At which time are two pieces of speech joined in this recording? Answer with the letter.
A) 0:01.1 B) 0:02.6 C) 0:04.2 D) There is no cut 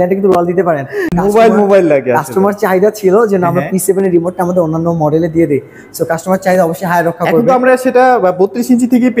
A